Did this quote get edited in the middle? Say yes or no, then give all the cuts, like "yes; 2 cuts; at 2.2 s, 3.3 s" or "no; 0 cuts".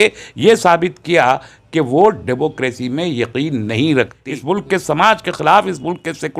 yes; 1 cut; at 4.2 s